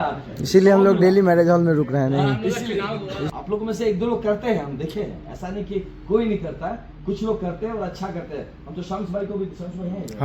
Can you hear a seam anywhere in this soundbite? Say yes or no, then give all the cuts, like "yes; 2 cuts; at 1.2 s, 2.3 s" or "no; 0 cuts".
yes; 1 cut; at 3.3 s